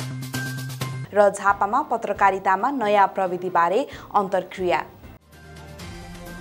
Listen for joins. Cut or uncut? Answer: uncut